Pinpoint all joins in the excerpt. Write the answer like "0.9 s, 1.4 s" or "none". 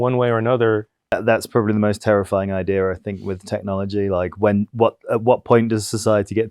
1.1 s